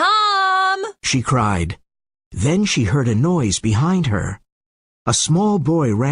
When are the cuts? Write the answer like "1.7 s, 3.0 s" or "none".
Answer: 0.9 s